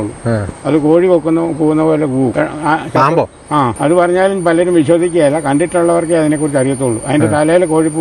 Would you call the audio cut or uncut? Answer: cut